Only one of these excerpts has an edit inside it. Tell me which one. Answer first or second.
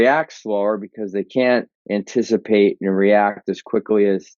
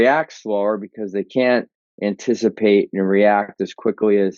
first